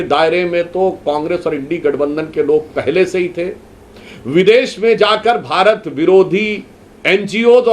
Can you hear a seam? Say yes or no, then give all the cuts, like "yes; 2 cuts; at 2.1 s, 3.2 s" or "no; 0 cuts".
no; 0 cuts